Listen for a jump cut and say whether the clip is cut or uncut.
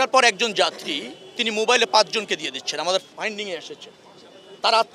uncut